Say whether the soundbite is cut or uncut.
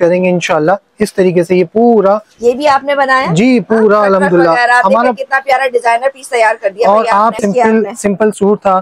cut